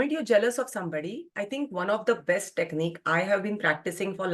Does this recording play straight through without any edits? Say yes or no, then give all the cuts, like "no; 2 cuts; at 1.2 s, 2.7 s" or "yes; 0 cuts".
yes; 0 cuts